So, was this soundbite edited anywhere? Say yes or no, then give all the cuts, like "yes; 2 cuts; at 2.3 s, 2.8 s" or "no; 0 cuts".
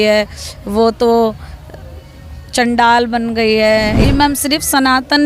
yes; 1 cut; at 4.0 s